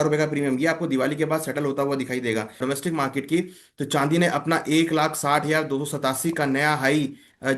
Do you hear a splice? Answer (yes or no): yes